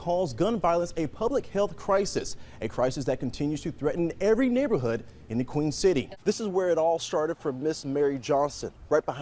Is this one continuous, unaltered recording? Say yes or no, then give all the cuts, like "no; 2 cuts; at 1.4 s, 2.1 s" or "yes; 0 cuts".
no; 1 cut; at 6.1 s